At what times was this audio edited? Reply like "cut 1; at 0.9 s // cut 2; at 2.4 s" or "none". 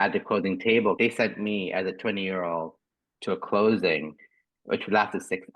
cut 1; at 1.0 s

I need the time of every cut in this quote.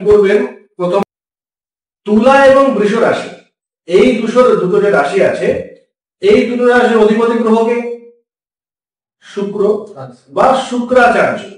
cut 1; at 1.0 s

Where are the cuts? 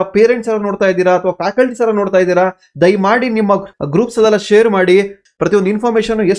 cut 1; at 3.7 s // cut 2; at 5.2 s

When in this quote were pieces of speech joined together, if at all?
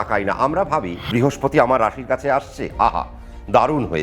cut 1; at 1.0 s

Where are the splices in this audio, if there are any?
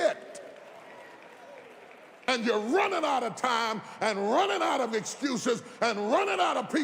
cut 1; at 2.3 s

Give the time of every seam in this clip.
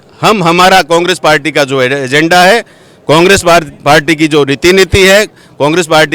none

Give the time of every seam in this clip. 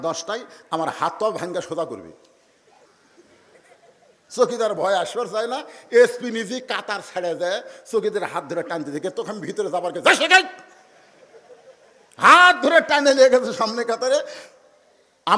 cut 1; at 2.9 s

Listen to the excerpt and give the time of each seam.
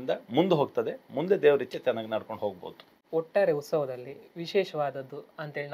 none

